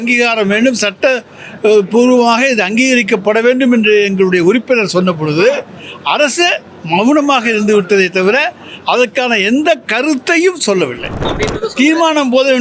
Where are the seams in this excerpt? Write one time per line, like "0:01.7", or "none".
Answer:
0:11.3